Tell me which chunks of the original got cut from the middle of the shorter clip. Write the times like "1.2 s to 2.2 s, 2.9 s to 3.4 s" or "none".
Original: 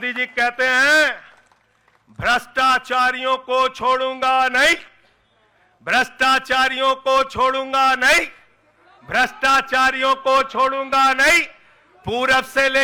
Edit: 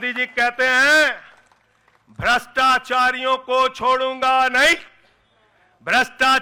none